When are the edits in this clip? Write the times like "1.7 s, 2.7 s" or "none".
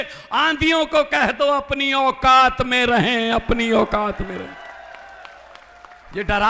none